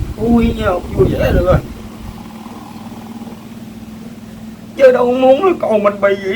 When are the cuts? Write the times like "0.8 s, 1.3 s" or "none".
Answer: none